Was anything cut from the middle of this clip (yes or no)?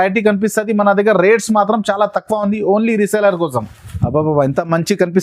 yes